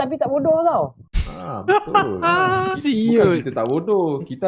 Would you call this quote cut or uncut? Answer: cut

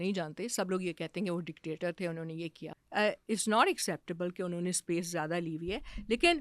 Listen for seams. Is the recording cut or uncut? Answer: cut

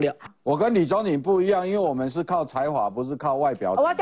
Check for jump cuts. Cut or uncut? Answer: uncut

